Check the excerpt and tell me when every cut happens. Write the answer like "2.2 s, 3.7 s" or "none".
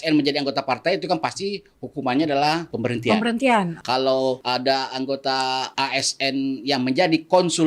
2.7 s, 4.0 s, 5.7 s